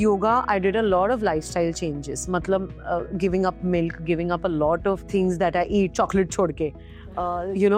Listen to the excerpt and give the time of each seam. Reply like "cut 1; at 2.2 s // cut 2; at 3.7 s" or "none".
none